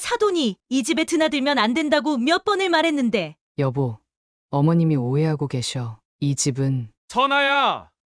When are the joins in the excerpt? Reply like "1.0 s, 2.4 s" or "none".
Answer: 3.4 s, 6.9 s